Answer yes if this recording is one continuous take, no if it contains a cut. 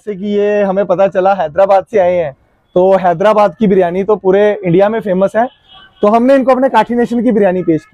yes